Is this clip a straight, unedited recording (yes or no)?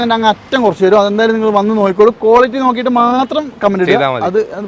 yes